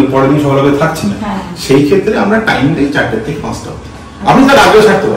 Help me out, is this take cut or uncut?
uncut